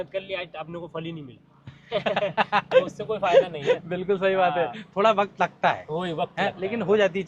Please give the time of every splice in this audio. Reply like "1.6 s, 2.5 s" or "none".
none

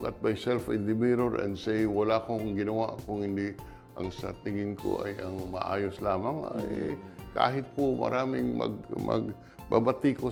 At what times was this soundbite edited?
none

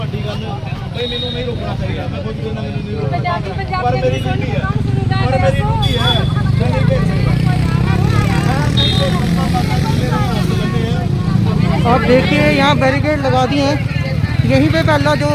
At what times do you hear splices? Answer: none

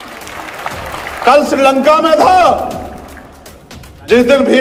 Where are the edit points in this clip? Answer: none

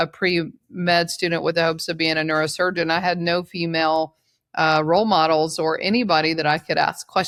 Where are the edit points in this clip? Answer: none

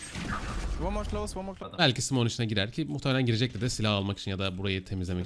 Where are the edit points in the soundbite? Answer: 1.6 s

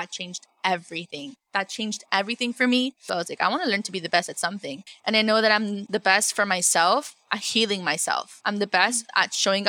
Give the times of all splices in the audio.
3.0 s

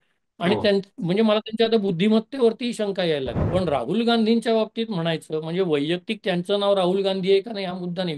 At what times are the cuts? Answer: 3.4 s

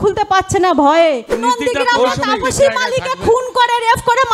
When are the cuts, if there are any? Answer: 1.3 s

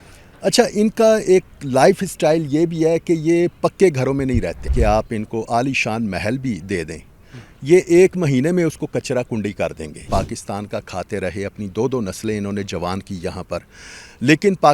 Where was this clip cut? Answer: 4.7 s, 10.0 s

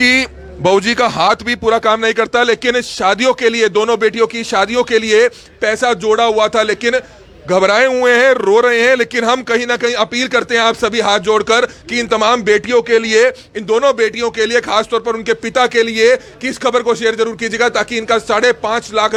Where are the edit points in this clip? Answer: none

